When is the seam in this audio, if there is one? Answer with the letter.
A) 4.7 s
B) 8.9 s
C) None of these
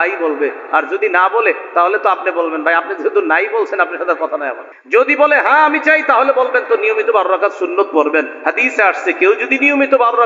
A